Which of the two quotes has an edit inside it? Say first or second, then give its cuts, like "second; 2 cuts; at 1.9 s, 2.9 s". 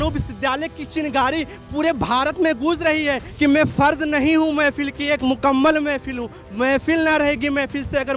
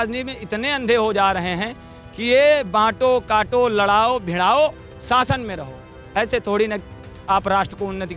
first; 1 cut; at 3.3 s